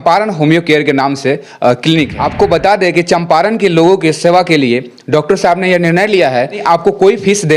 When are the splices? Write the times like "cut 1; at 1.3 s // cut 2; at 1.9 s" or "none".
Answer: cut 1; at 2.1 s // cut 2; at 6.6 s